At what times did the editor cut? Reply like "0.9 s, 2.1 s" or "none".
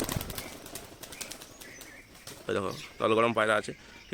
none